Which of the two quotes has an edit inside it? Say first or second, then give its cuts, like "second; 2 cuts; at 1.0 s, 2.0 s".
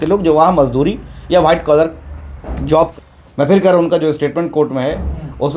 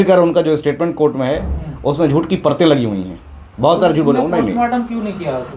first; 1 cut; at 2.6 s